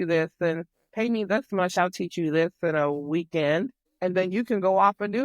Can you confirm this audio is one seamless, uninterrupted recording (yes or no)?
no